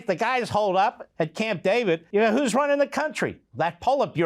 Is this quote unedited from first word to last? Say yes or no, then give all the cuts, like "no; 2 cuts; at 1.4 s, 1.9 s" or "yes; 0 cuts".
no; 1 cut; at 2.0 s